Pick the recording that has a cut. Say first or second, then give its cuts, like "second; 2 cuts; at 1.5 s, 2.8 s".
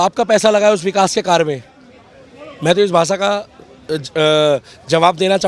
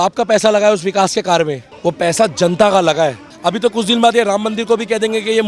second; 2 cuts; at 1.6 s, 3.3 s